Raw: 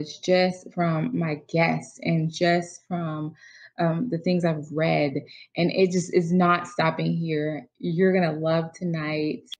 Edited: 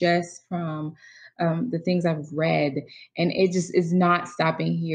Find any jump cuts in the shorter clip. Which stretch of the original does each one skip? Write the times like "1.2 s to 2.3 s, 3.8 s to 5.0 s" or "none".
none